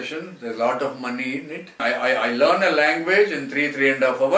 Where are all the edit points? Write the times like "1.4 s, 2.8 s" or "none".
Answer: 1.8 s